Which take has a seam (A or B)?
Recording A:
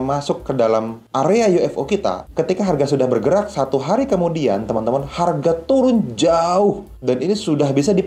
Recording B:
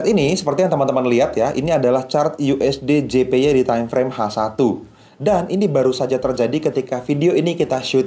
A